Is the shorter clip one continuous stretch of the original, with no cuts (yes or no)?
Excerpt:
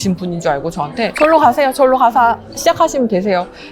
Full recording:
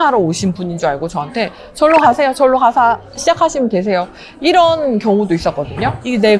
no